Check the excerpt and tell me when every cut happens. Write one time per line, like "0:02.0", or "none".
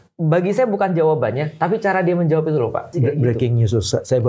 0:02.9